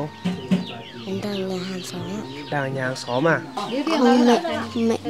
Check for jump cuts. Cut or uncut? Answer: cut